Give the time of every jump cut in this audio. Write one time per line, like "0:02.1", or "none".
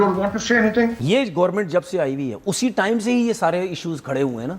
0:01.0